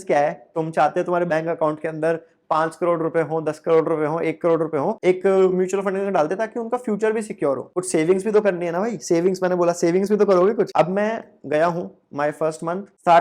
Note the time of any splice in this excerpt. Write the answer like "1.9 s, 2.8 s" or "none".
4.9 s, 10.7 s